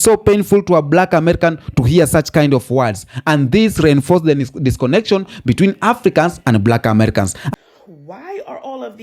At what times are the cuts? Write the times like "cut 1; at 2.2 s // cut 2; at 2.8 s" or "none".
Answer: cut 1; at 7.4 s